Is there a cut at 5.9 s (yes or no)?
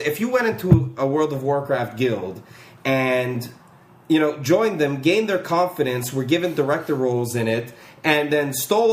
no